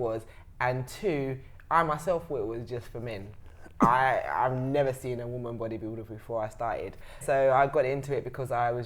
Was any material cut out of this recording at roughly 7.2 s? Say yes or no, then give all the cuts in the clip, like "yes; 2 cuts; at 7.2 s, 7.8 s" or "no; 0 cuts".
yes; 1 cut; at 7.2 s